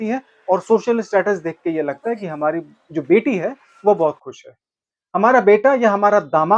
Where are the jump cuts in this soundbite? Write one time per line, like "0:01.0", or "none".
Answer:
none